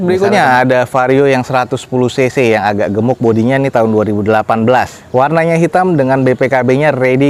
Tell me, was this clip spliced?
no; 0 cuts

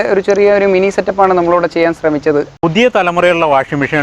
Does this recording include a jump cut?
yes; 1 cut; at 2.5 s

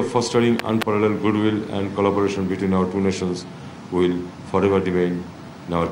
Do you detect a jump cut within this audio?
no; 0 cuts

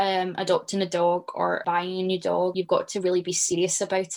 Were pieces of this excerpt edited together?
yes; 2 cuts; at 1.6 s, 2.5 s

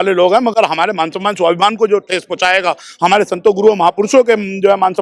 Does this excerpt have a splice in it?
no; 0 cuts

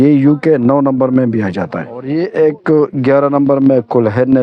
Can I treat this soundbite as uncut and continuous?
no; 1 cut; at 2.0 s

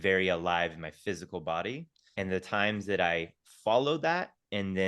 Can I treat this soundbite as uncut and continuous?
no; 1 cut; at 2.0 s

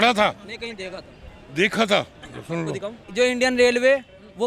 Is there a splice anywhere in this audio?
yes; 1 cut; at 3.0 s

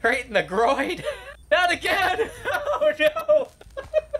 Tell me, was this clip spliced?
yes; 1 cut; at 1.3 s

